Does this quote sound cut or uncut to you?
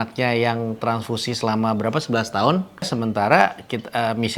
cut